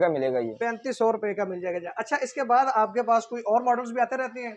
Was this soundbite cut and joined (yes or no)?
no